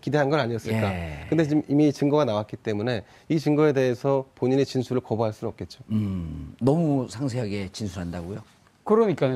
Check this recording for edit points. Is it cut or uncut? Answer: cut